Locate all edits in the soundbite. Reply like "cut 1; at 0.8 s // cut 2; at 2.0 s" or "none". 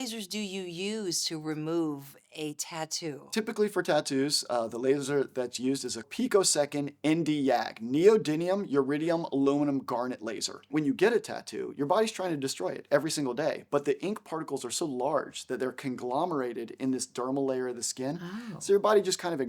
cut 1; at 3.3 s // cut 2; at 6.1 s // cut 3; at 10.7 s